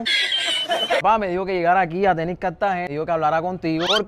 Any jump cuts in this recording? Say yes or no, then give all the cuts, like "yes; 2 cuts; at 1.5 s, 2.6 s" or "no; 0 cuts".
yes; 1 cut; at 1.0 s